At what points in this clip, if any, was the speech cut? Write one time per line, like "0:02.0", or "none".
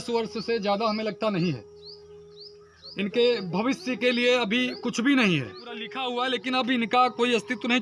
0:05.9